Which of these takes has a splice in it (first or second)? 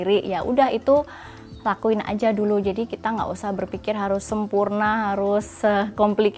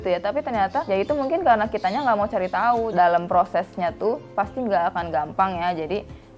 second